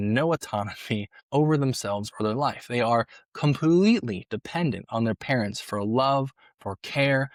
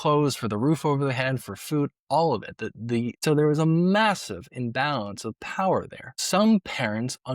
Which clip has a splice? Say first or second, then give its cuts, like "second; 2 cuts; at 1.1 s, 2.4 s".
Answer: second; 2 cuts; at 3.2 s, 6.2 s